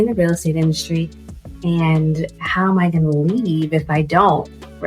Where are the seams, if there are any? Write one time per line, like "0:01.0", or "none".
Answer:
none